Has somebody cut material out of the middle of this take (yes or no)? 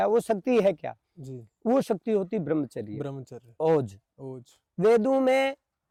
no